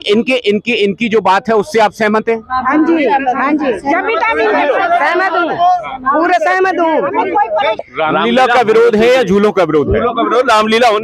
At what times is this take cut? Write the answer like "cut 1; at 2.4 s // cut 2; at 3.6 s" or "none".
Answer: cut 1; at 7.8 s